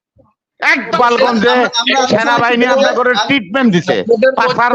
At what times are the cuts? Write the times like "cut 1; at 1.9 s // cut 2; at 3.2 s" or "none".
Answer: cut 1; at 0.9 s